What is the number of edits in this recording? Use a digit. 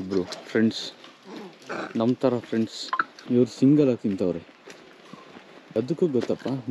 2